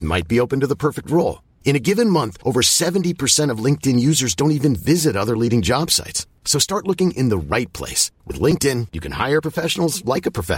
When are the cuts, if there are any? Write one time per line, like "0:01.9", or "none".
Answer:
none